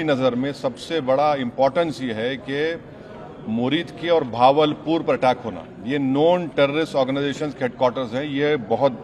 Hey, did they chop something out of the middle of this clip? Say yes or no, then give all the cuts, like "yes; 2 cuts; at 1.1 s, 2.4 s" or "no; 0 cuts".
no; 0 cuts